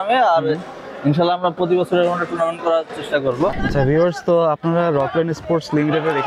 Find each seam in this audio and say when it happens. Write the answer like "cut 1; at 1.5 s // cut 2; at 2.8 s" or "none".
cut 1; at 3.6 s